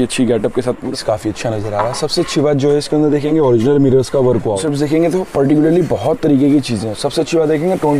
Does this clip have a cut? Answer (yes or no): yes